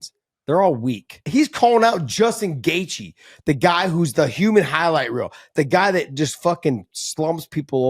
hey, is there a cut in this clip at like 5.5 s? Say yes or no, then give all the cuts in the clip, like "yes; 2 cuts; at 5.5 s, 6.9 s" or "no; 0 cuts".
no; 1 cut; at 1.2 s